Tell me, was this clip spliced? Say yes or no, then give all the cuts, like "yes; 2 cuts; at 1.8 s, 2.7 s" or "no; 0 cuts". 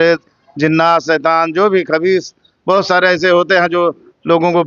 no; 0 cuts